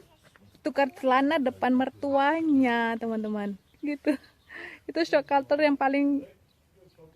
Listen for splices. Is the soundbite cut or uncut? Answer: cut